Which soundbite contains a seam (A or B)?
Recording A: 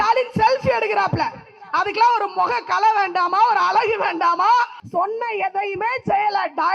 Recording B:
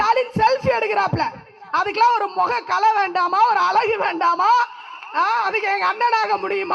A